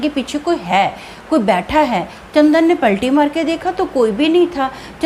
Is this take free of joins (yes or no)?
yes